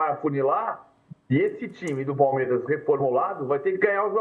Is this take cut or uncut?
uncut